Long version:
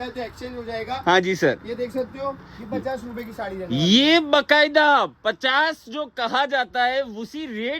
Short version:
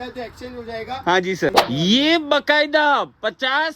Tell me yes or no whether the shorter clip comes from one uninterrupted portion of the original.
no